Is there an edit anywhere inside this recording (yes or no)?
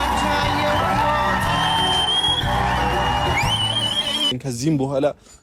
yes